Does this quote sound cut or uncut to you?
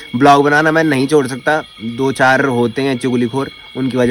uncut